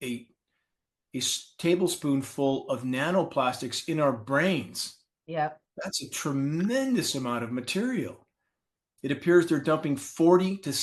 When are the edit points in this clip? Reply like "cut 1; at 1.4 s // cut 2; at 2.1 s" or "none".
cut 1; at 8.9 s

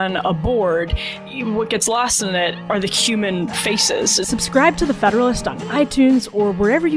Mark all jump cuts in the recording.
cut 1; at 1.2 s // cut 2; at 4.3 s

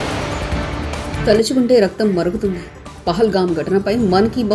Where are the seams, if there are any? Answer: cut 1; at 1.1 s

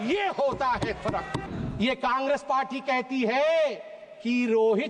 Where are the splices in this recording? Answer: cut 1; at 1.4 s

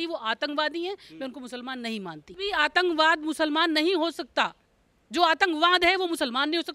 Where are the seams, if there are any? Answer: cut 1; at 2.3 s

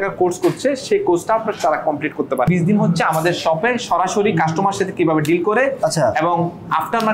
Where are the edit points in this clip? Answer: cut 1; at 2.5 s

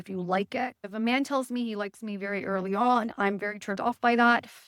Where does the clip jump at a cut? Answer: none

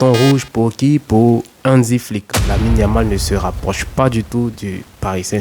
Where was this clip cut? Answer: cut 1; at 2.3 s

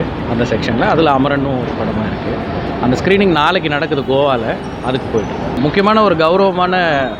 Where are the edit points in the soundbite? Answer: cut 1; at 5.6 s

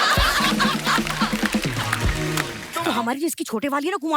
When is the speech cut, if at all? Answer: cut 1; at 2.6 s

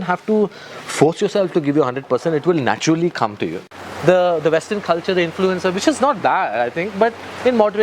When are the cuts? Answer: cut 1; at 3.6 s

